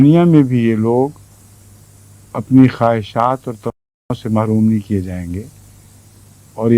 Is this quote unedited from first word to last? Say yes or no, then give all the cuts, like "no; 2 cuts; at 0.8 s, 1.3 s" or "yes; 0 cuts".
yes; 0 cuts